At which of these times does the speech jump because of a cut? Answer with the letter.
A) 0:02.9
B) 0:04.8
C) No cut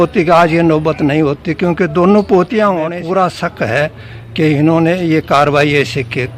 A